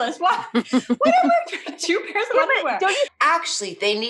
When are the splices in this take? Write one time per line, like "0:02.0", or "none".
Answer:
0:03.1